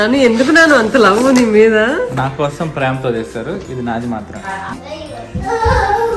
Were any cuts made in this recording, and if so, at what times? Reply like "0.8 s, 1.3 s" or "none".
4.7 s